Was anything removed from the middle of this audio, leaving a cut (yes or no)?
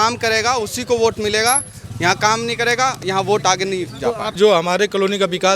yes